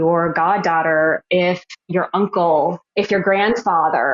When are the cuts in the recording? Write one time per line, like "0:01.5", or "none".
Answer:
0:02.8